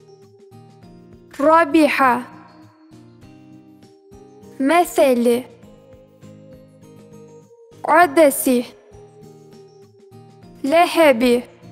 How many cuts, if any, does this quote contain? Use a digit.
8